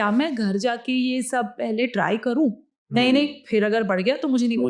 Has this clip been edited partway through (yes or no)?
no